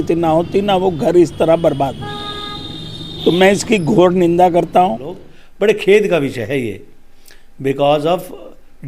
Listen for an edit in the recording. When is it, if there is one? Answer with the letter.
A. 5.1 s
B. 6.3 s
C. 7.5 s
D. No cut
A